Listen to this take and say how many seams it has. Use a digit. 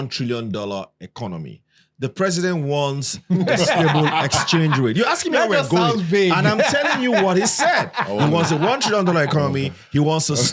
0